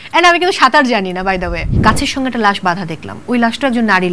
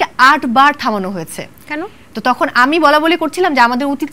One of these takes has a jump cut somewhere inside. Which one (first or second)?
first